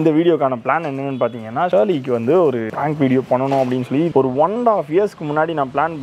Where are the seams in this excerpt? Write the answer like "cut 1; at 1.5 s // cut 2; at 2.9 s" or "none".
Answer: cut 1; at 4.1 s